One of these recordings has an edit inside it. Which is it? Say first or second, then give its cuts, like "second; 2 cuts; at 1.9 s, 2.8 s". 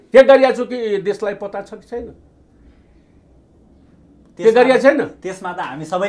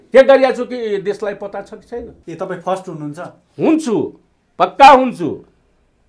second; 1 cut; at 2.2 s